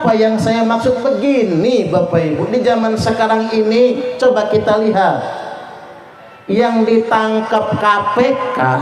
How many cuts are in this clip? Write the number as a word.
zero